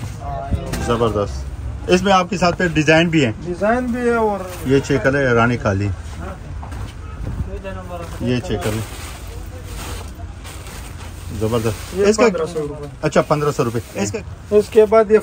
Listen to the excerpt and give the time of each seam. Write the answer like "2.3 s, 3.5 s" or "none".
4.4 s, 14.1 s